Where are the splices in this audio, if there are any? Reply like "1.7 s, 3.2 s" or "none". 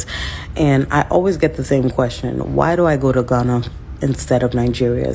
none